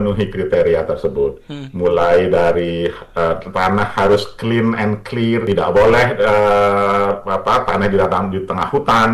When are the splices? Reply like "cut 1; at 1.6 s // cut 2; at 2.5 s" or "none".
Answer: cut 1; at 5.4 s